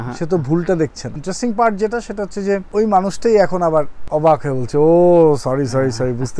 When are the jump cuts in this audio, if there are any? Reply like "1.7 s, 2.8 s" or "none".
1.1 s, 2.7 s, 4.0 s